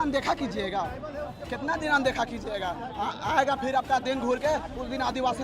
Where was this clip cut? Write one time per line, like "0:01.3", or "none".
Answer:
none